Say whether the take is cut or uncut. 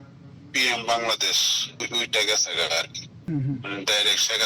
cut